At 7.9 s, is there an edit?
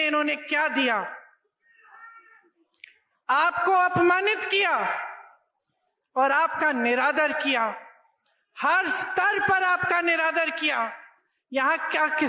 no; 0 cuts

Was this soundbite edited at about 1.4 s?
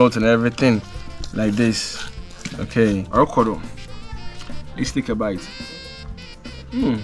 no; 1 cut; at 3.1 s

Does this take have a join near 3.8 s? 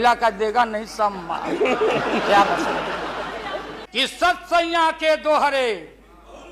yes; 1 cut; at 3.8 s

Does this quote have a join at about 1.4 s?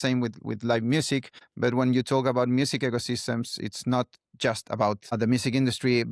yes; 1 cut; at 1.4 s

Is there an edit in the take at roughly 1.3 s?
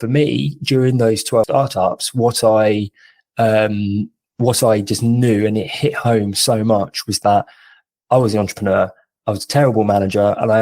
yes; 1 cut; at 1.3 s

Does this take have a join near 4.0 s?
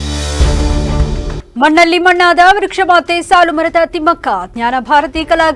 no; 1 cut; at 1.3 s

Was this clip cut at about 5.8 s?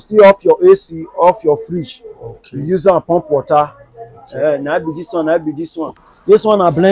yes; 1 cut; at 5.8 s

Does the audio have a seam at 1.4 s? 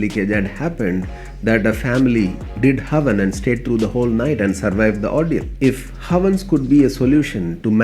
no; 1 cut; at 5.5 s

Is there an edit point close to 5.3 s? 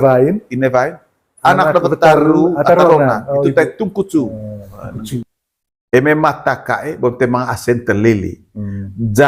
yes; 1 cut; at 5.3 s

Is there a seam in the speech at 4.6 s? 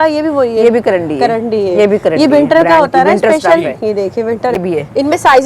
yes; 1 cut; at 4.6 s

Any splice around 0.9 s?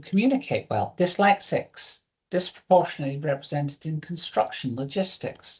yes; 1 cut; at 0.9 s

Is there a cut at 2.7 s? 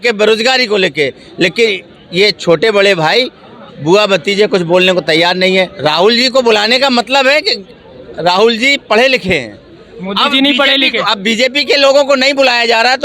no; 1 cut; at 5.7 s

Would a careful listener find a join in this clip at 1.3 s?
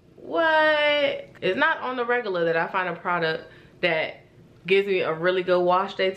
yes; 1 cut; at 1.3 s

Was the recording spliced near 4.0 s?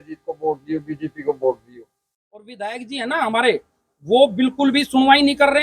no; 1 cut; at 2.5 s

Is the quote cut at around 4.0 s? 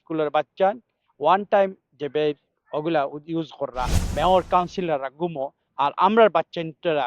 yes; 1 cut; at 4.0 s

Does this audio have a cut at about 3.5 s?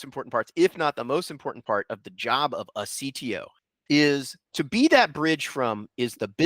yes; 2 cuts; at 3.5 s, 4.4 s

